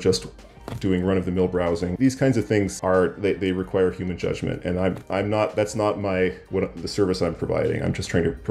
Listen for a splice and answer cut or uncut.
cut